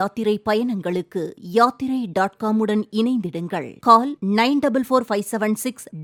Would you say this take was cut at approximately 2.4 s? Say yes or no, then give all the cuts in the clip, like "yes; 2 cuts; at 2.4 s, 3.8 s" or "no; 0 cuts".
no; 0 cuts